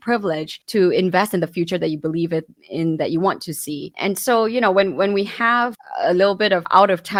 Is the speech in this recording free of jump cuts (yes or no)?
yes